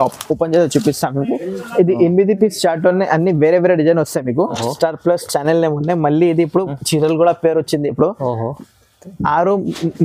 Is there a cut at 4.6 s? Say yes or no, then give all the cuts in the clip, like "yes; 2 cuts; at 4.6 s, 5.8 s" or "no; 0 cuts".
yes; 1 cut; at 4.6 s